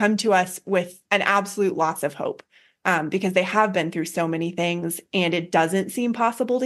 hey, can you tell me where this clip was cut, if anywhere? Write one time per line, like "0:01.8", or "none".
0:01.0

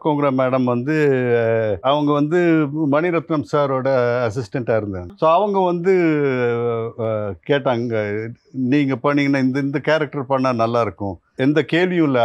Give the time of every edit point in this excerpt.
0:05.0
0:11.3

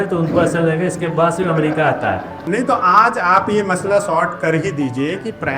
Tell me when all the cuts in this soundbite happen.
0:02.3

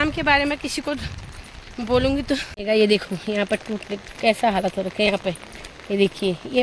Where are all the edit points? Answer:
0:02.6

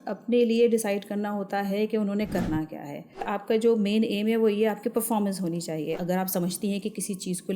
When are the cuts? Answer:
0:03.3
0:06.0

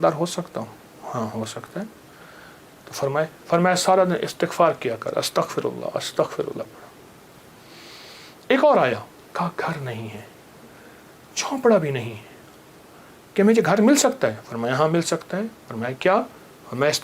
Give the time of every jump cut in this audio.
none

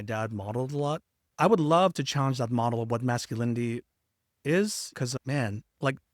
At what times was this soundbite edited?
0:01.3

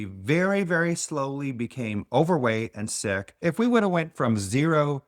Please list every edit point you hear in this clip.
0:03.3

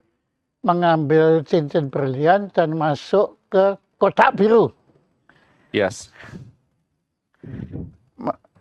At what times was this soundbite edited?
none

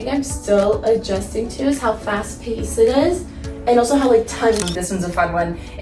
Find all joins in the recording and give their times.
0:04.6

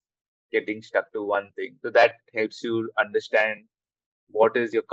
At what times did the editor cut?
0:01.7

